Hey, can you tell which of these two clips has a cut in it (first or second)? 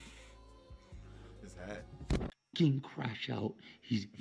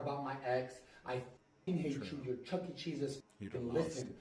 first